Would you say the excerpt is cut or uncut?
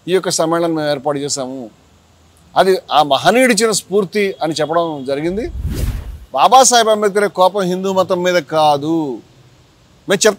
cut